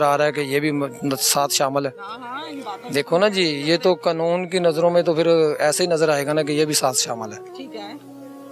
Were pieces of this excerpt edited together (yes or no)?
no